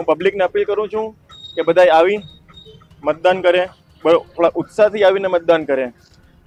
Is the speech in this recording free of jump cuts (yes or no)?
yes